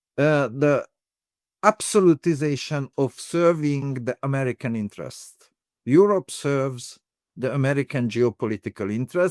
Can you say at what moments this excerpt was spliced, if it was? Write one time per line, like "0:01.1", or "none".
0:02.8